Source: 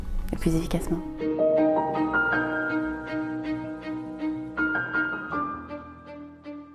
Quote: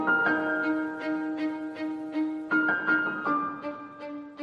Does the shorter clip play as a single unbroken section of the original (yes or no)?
yes